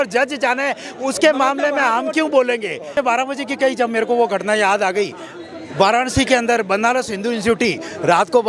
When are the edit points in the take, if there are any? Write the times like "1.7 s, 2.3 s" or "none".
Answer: 2.8 s